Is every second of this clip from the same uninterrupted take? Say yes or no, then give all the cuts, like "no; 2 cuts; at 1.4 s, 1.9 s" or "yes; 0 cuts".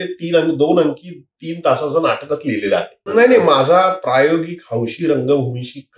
no; 1 cut; at 3.1 s